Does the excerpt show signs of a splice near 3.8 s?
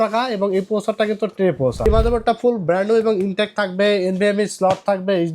no; 1 cut; at 1.9 s

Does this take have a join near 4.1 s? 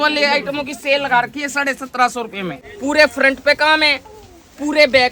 no; 1 cut; at 2.6 s

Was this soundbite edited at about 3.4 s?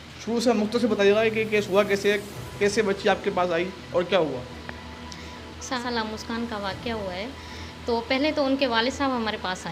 no; 1 cut; at 5.8 s

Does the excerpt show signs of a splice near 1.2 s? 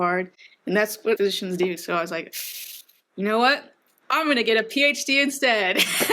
yes; 1 cut; at 1.2 s

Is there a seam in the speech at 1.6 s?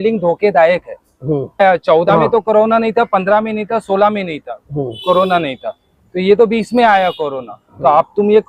yes; 1 cut; at 1.6 s

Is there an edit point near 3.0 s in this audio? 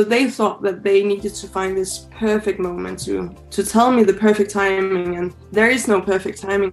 no; 1 cut; at 5.3 s

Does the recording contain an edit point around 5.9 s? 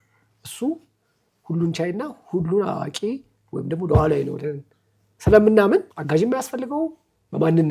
yes; 1 cut; at 5.9 s

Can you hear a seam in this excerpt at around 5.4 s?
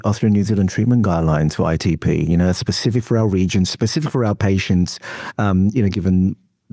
no; 0 cuts

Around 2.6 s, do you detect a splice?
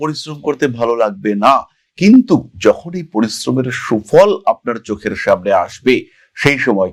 no; 0 cuts

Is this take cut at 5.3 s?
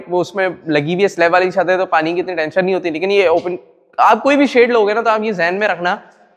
no; 0 cuts

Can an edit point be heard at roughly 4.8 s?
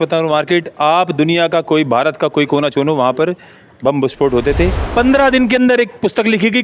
yes; 1 cut; at 4.8 s

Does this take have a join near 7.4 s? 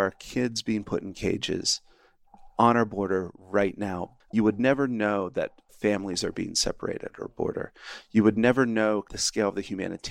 no; 2 cuts; at 4.1 s, 9.2 s

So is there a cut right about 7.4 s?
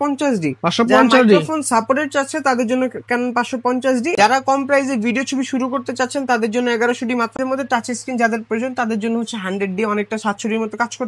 yes; 2 cuts; at 4.1 s, 7.4 s

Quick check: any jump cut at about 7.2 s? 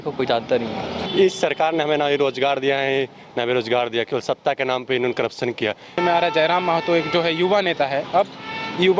no; 2 cuts; at 1.0 s, 6.0 s

